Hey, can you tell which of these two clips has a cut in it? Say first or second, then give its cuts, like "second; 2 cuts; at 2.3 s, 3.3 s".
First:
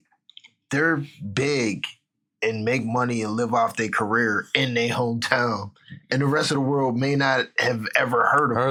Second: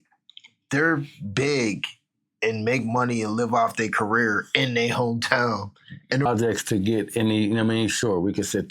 second; 1 cut; at 6.3 s